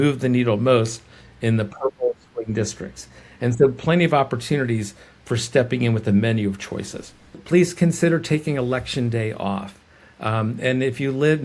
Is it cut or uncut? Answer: cut